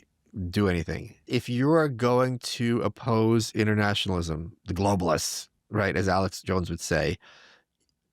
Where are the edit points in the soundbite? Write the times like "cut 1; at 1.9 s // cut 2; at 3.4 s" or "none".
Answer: cut 1; at 1.2 s